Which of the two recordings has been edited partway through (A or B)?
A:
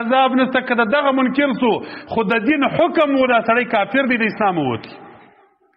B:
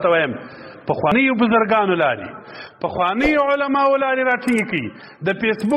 B